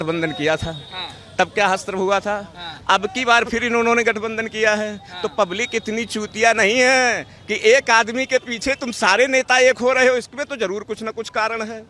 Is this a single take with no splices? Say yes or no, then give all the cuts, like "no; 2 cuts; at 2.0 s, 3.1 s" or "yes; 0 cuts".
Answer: yes; 0 cuts